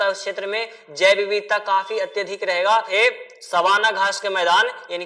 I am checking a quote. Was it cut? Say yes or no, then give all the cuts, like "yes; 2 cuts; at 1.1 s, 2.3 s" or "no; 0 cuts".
yes; 1 cut; at 2.9 s